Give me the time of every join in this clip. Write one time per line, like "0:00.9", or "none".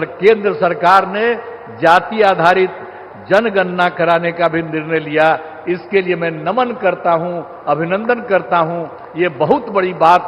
none